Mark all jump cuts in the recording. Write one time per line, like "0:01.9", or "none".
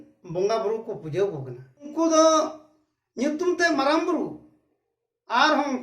0:01.9